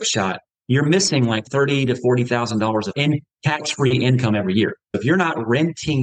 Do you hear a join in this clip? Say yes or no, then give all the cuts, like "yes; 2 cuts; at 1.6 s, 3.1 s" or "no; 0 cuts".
yes; 3 cuts; at 1.4 s, 3.0 s, 5.0 s